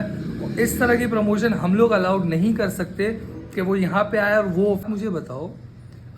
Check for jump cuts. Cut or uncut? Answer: cut